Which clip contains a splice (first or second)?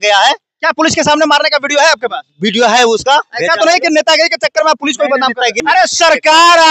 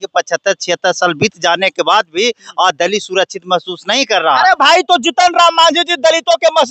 first